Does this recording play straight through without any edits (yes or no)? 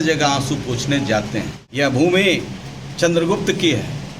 no